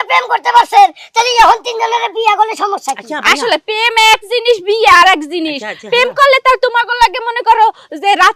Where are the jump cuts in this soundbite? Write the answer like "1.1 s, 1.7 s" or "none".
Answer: none